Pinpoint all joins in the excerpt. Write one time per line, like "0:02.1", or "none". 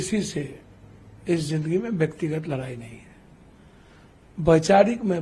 none